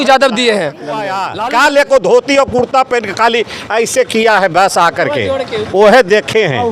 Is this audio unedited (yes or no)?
no